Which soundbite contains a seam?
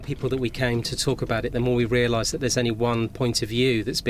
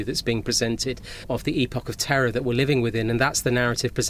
second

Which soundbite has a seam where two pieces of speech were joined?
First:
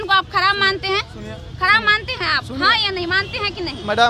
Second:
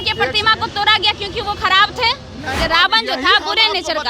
second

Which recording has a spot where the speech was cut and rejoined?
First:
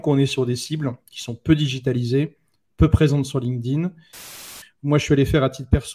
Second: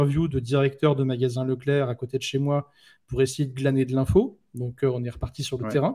first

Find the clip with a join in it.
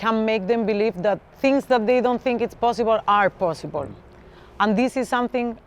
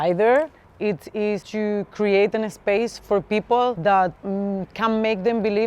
second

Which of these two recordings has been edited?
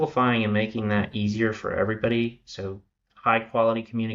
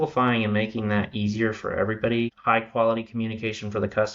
second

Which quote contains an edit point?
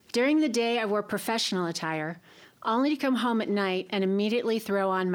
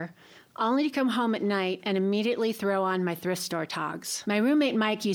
second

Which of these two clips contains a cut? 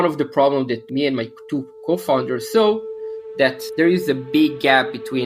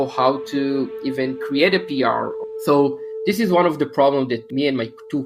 second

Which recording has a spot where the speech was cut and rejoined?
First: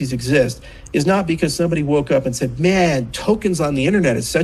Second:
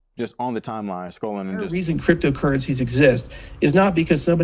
second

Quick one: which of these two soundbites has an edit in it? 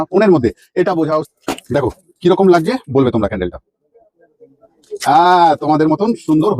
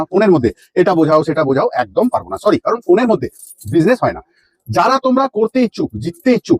first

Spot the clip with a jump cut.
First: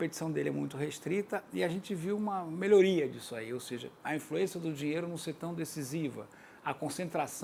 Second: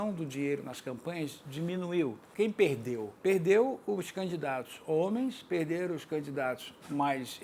second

